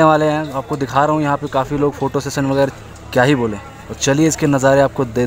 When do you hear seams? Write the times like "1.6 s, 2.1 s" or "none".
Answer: 2.7 s